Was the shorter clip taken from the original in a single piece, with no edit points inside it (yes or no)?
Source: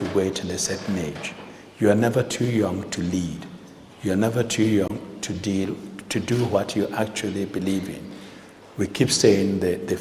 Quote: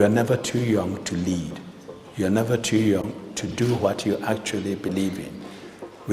no